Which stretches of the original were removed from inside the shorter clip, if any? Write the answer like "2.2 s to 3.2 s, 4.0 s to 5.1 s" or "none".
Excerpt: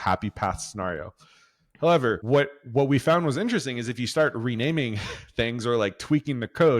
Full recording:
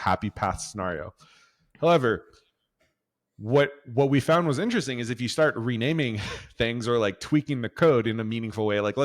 2.2 s to 3.4 s